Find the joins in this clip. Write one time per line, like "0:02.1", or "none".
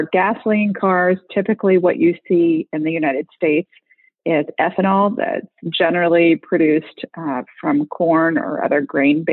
none